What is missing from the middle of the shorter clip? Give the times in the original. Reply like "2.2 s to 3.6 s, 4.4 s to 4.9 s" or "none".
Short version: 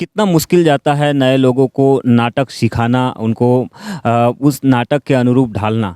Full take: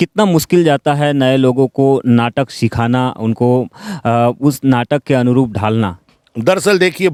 none